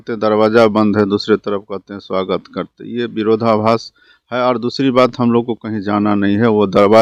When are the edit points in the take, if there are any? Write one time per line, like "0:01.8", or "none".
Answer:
none